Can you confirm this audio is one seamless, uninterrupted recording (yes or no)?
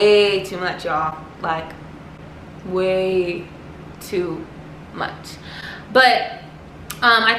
yes